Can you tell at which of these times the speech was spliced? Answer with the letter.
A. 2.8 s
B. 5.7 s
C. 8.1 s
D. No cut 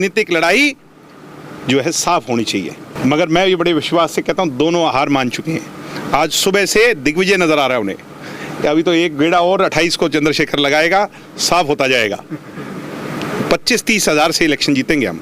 A